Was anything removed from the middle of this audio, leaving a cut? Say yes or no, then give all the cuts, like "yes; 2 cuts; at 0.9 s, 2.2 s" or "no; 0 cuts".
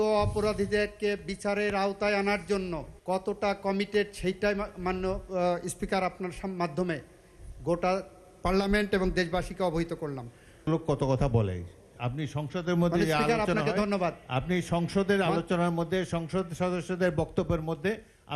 yes; 1 cut; at 2.9 s